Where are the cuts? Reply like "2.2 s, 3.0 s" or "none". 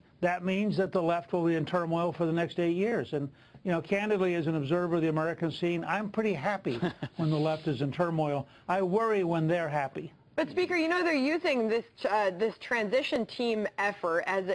2.5 s